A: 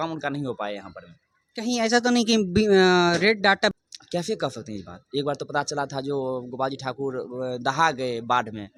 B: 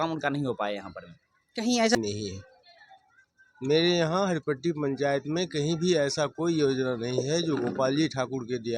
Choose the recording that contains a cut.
B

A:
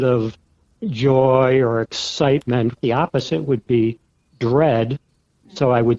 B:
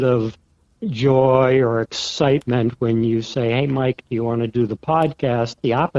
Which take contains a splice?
A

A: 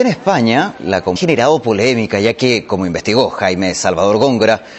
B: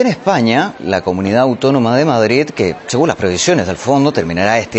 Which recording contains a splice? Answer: B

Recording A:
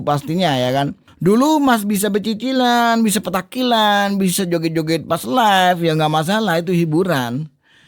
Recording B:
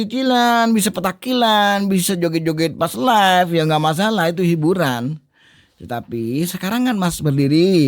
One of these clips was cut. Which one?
A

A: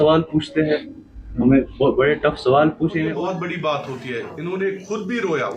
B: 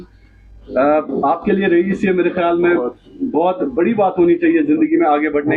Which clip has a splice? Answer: A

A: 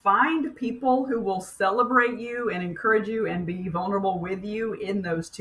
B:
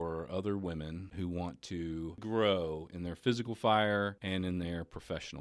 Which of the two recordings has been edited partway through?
B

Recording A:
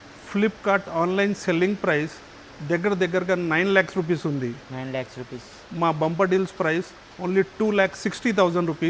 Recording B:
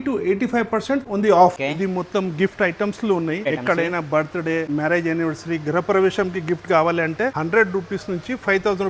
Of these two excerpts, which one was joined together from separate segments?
B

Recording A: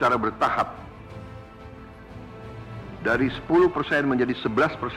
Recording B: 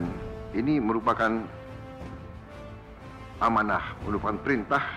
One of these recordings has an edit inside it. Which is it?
B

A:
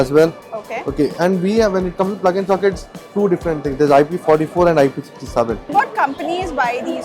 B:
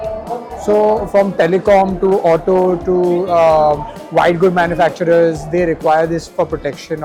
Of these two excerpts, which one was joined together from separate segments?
A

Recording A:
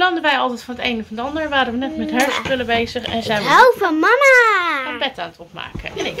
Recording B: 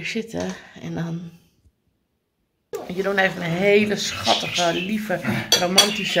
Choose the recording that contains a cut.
B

